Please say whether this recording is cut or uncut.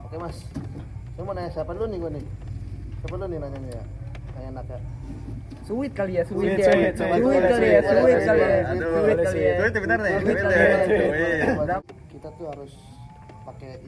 cut